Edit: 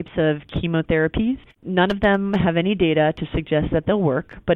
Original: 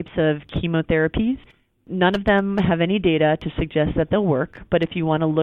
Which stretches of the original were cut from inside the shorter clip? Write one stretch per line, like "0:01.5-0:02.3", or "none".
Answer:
0:01.5-0:01.8